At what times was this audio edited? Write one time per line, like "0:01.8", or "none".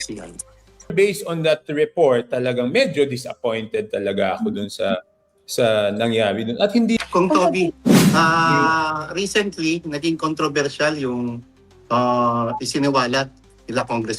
0:00.9
0:07.0